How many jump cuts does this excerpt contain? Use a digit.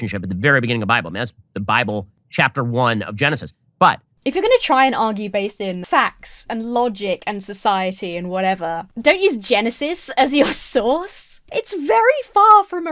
1